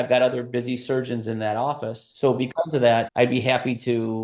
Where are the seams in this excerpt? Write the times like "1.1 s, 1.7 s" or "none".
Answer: 2.1 s